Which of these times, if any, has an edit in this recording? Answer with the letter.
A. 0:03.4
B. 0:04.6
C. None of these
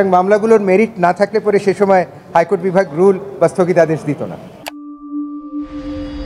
B